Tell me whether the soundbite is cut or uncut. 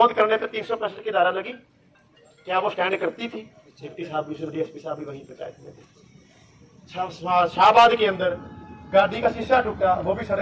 uncut